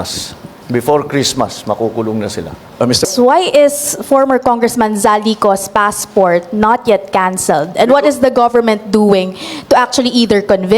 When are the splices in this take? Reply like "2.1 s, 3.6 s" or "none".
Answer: 3.1 s